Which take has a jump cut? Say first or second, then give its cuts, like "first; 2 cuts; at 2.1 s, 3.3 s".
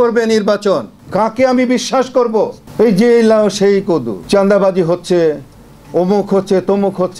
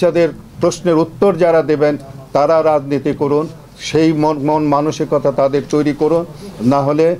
first; 3 cuts; at 1.0 s, 2.6 s, 4.2 s